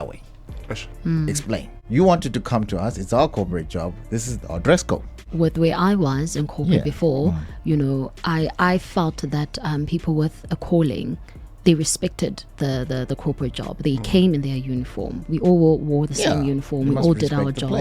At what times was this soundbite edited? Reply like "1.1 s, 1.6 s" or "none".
1.7 s, 5.2 s